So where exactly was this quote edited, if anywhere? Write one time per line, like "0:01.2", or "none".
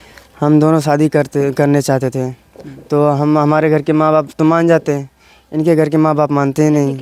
none